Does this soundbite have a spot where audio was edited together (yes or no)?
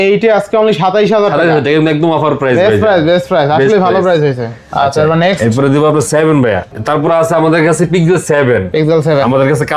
no